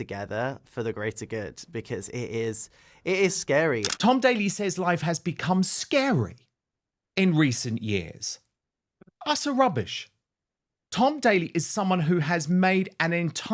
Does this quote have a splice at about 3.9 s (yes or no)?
yes